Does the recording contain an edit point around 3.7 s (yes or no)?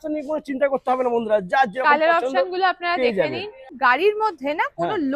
yes